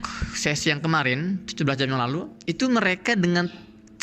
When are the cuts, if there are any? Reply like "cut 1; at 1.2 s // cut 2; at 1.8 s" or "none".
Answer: cut 1; at 2.3 s